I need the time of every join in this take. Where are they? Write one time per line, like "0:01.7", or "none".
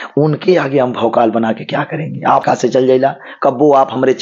0:02.4